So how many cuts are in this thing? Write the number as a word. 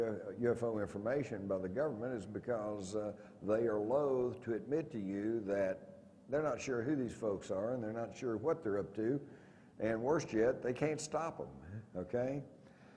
zero